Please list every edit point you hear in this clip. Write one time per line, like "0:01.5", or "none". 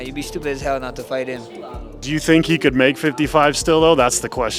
none